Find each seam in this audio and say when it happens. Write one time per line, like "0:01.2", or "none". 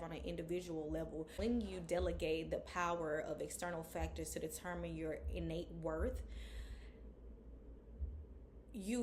0:01.3